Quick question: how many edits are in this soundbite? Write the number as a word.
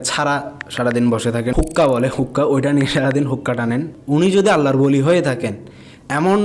two